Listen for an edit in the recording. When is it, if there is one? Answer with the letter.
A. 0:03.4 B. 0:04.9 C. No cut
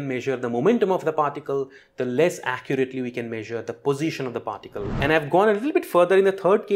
B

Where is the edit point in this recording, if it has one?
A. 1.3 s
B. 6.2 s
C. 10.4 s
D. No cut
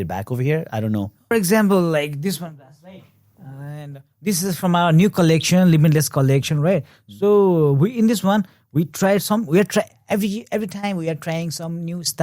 A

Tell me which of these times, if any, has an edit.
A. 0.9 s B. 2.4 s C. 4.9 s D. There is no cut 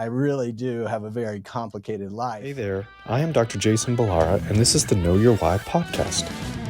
B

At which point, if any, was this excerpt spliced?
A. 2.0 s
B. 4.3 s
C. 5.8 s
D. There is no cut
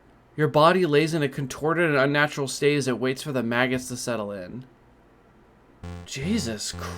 C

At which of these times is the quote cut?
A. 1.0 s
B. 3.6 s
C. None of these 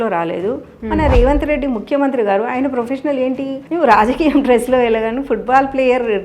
B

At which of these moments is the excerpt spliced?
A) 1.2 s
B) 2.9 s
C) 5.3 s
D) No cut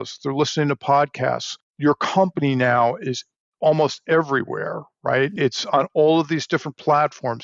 C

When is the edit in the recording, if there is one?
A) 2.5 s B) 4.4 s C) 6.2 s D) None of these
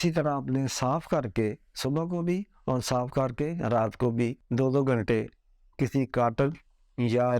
B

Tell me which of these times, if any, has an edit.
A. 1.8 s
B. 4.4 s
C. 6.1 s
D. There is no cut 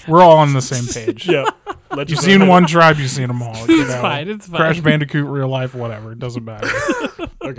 D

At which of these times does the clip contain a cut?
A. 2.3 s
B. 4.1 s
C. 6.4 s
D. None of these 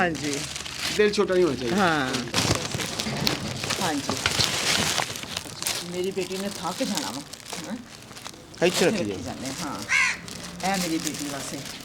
A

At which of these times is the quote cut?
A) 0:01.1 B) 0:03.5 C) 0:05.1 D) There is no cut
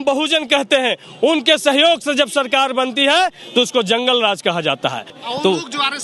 C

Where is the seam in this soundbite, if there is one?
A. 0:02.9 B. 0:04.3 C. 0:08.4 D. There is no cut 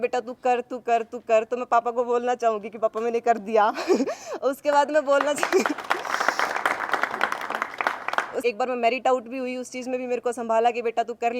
C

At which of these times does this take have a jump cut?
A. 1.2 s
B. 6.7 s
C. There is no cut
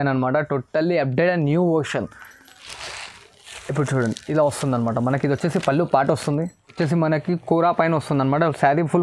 B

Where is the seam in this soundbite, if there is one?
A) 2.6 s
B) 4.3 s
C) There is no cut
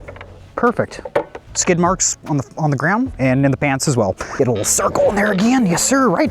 B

